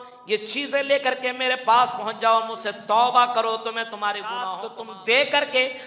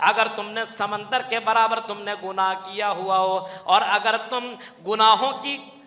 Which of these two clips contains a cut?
first; 1 cut; at 4.6 s

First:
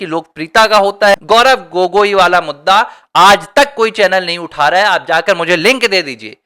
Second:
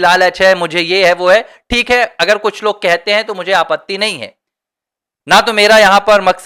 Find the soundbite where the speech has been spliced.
first; 1 cut; at 1.1 s

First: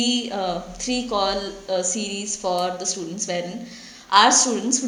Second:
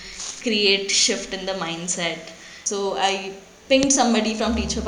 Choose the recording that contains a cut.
second; 1 cut; at 2.5 s

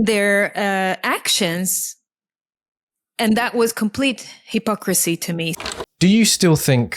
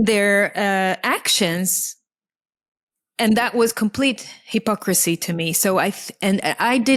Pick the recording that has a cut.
first; 1 cut; at 5.5 s

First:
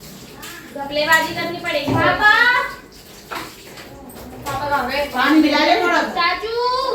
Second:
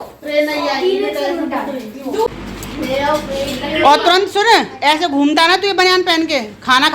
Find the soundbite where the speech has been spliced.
second; 1 cut; at 2.3 s

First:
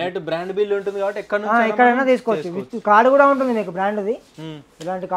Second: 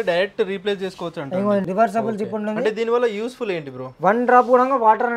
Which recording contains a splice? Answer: second; 1 cut; at 1.7 s

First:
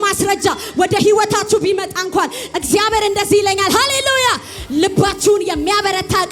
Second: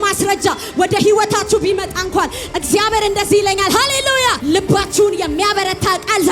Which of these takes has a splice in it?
second; 1 cut; at 4.4 s

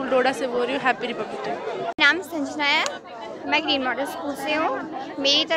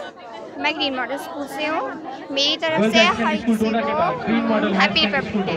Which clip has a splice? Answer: first; 1 cut; at 1.9 s

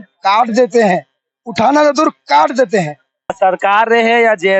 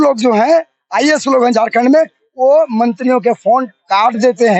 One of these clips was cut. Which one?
first; 1 cut; at 3.4 s

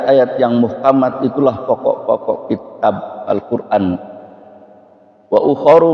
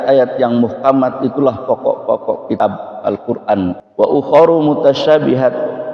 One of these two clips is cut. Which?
second; 2 cuts; at 2.6 s, 3.8 s

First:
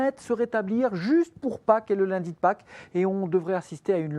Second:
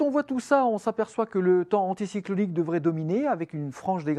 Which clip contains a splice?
second; 1 cut; at 2.7 s

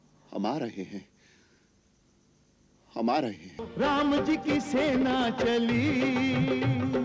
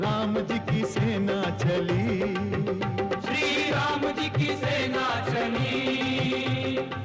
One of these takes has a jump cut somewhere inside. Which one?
first; 1 cut; at 3.6 s

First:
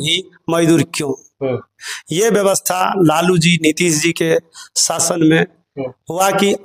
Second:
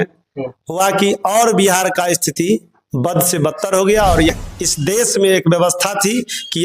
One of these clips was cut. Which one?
second; 1 cut; at 4.3 s

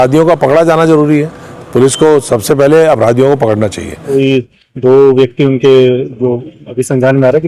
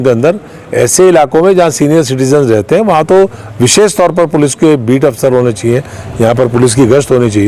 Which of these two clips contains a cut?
first; 1 cut; at 4.0 s

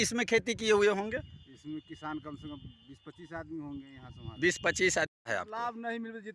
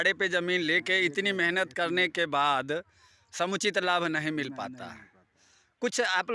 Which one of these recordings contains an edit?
first; 1 cut; at 5.1 s

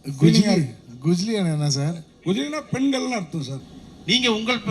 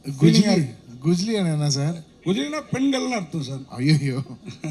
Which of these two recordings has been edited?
first; 1 cut; at 3.6 s

